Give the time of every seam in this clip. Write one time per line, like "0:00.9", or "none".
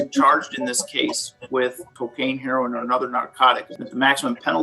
0:01.9
0:03.7